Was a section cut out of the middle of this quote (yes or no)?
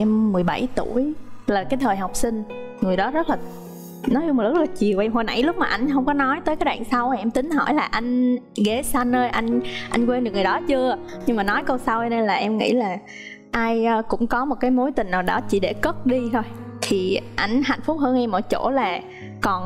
no